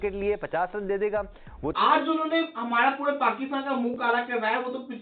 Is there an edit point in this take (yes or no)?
yes